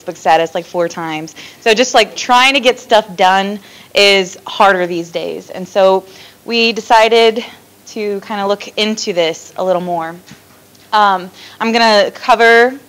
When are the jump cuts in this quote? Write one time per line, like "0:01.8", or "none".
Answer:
0:01.6